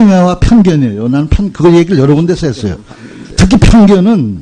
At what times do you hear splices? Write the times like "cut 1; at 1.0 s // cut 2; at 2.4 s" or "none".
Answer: none